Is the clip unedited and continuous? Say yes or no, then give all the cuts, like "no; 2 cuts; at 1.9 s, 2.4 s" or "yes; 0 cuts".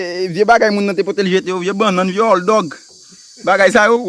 yes; 0 cuts